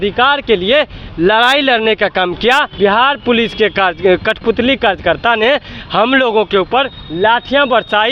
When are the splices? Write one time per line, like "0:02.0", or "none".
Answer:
0:02.7